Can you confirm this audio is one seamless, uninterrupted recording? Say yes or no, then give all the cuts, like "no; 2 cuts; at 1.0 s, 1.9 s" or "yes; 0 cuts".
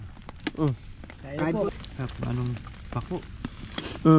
no; 1 cut; at 1.7 s